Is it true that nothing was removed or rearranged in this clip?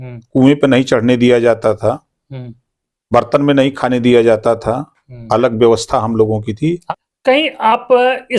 no; 1 cut; at 6.8 s

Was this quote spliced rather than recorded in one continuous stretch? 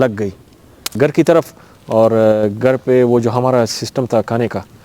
yes; 1 cut; at 1.0 s

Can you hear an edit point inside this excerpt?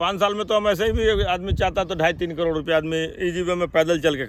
no; 0 cuts

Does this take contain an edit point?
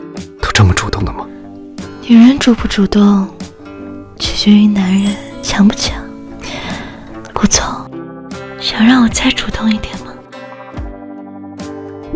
no; 0 cuts

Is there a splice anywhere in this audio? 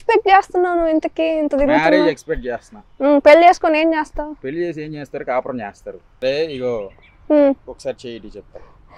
yes; 1 cut; at 6.1 s

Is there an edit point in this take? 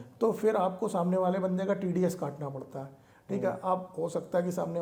no; 0 cuts

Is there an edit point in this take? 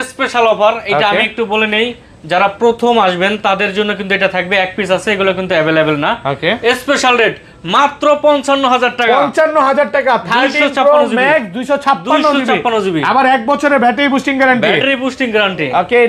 no; 0 cuts

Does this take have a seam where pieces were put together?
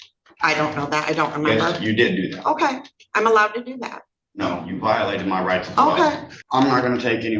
yes; 1 cut; at 6.3 s

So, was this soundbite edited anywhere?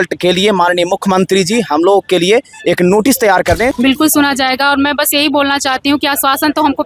yes; 1 cut; at 3.7 s

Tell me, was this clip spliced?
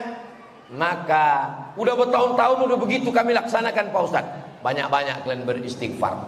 yes; 1 cut; at 1.6 s

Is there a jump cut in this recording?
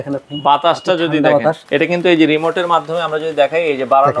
yes; 1 cut; at 1.6 s

